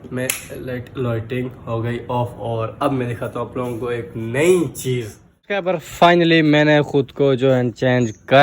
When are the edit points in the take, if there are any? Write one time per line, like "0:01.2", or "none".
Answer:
0:05.7

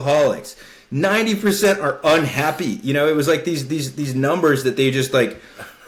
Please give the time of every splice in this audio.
none

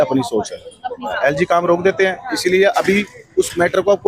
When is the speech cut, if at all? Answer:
0:01.1

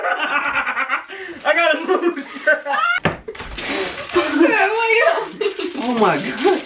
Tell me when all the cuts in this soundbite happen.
0:02.9

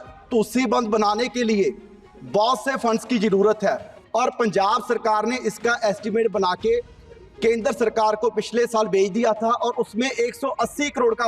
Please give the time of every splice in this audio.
0:03.9

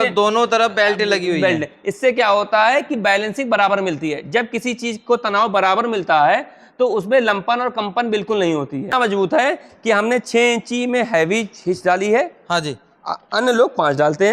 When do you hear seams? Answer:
0:08.9

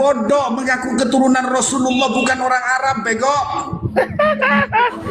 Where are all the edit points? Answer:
0:03.9

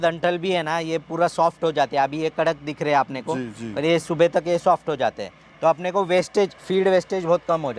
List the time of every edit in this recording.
none

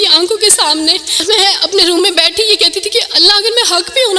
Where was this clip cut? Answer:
0:01.2

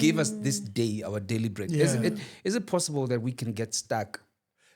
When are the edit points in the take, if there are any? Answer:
none

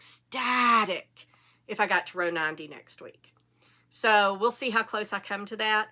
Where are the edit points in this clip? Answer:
none

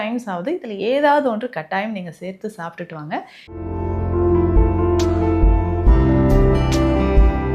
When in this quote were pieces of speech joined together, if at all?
0:03.4

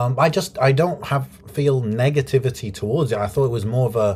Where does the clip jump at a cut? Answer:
none

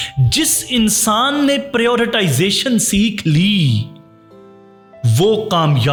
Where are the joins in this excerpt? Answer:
none

